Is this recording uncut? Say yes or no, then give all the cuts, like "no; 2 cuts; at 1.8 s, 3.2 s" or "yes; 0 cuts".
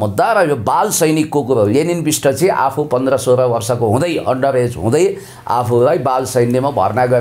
yes; 0 cuts